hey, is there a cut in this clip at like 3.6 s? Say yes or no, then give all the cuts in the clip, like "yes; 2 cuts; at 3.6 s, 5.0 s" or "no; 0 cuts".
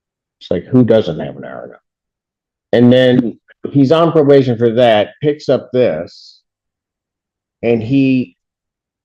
no; 0 cuts